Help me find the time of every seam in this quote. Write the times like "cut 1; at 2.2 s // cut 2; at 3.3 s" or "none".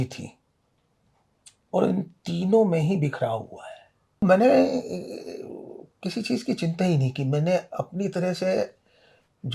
cut 1; at 4.2 s